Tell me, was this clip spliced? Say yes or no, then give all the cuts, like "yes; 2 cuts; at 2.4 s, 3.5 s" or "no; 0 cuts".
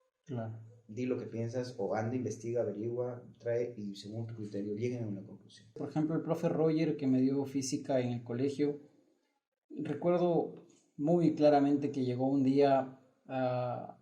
yes; 1 cut; at 5.8 s